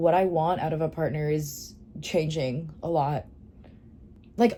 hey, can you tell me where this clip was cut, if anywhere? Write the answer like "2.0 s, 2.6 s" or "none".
none